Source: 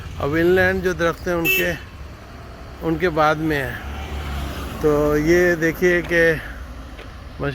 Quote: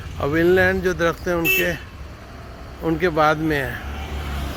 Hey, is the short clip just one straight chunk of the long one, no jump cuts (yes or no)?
yes